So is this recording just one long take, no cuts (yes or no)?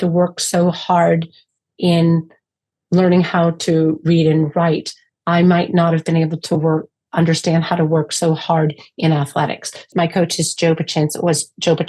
no